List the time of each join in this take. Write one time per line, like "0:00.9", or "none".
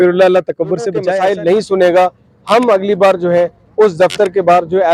0:01.1